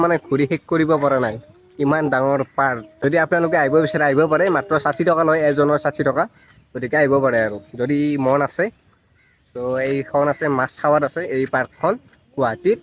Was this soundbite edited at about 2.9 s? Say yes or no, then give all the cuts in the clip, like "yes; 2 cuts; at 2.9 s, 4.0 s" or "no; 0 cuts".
no; 0 cuts